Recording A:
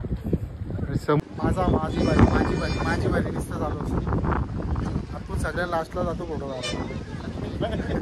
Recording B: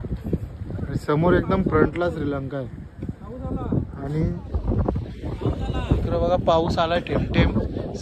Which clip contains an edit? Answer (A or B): A